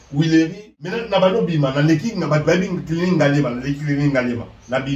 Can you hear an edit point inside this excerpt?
yes; 1 cut; at 1.0 s

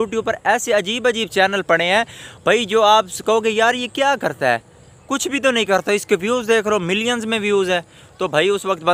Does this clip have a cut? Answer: no; 0 cuts

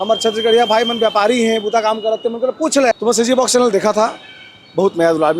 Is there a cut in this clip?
yes; 1 cut; at 2.9 s

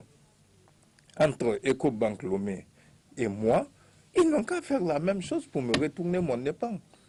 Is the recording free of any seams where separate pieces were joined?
yes; 0 cuts

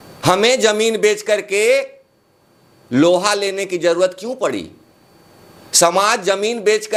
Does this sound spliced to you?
no; 0 cuts

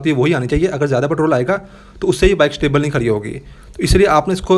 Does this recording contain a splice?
no; 0 cuts

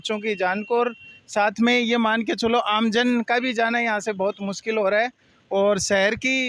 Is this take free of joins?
yes; 0 cuts

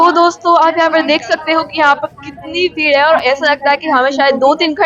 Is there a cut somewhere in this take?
no; 0 cuts

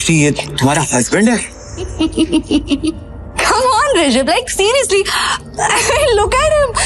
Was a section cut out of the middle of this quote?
yes; 1 cut; at 1.9 s

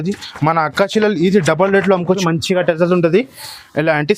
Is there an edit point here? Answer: yes; 1 cut; at 2.2 s

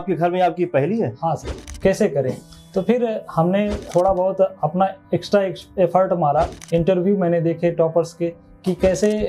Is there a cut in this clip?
yes; 2 cuts; at 1.6 s, 6.6 s

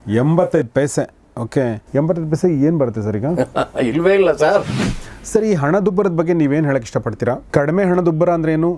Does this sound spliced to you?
yes; 2 cuts; at 1.8 s, 4.7 s

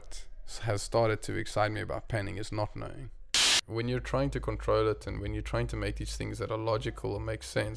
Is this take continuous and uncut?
no; 1 cut; at 3.6 s

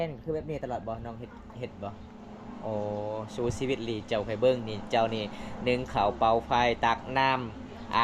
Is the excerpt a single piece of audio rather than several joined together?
yes; 0 cuts

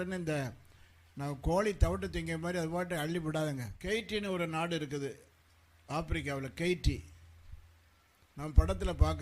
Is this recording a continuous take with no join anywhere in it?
no; 1 cut; at 3.7 s

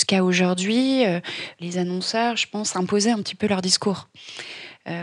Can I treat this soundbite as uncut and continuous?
no; 1 cut; at 1.5 s

